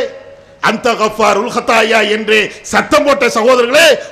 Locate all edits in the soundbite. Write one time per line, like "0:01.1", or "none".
none